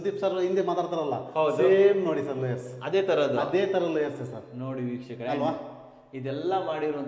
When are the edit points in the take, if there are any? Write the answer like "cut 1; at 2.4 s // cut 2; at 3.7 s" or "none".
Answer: none

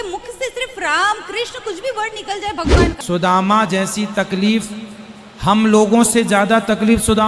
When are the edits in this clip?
cut 1; at 3.0 s

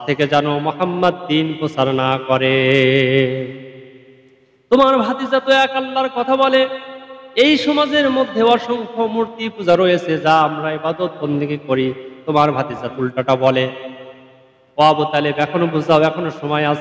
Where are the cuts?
cut 1; at 12.9 s

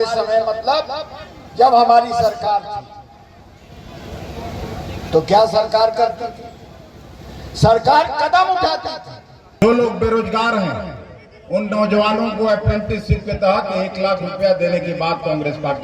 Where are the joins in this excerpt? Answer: cut 1; at 9.6 s

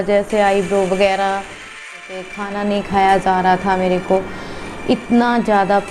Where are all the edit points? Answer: cut 1; at 1.8 s

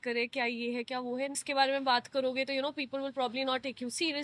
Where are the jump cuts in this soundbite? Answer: cut 1; at 1.4 s

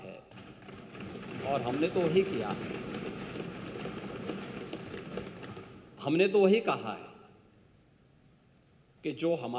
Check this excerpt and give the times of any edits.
none

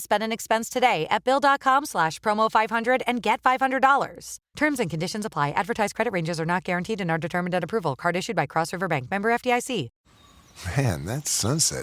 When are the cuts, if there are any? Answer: cut 1; at 10.0 s

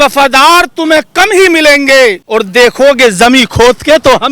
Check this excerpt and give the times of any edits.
cut 1; at 2.2 s

